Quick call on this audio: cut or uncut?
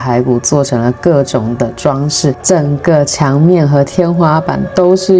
cut